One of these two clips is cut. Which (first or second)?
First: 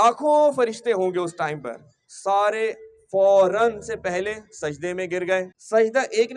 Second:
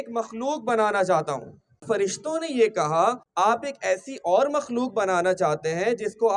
second